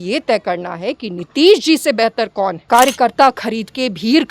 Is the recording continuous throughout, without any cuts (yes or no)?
no